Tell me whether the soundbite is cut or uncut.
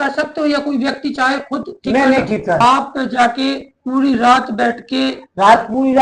cut